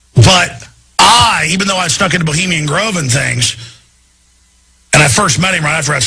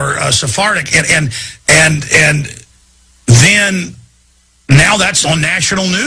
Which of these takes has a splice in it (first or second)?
first